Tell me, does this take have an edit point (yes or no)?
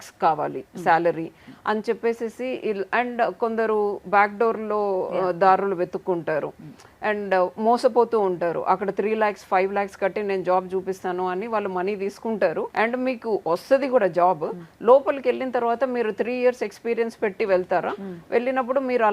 no